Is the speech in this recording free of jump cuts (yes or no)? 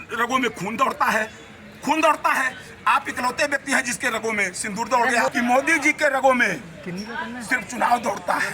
no